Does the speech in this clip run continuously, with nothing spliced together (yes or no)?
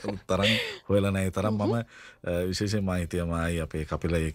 yes